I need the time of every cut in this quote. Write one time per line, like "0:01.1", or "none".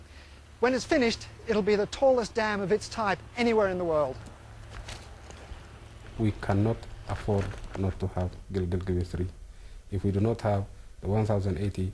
0:06.6

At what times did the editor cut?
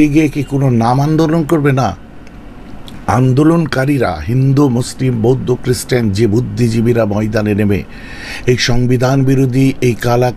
none

